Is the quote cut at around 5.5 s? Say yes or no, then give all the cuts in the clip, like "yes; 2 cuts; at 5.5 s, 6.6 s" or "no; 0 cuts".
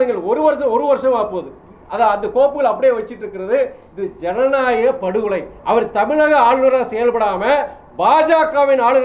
yes; 1 cut; at 5.5 s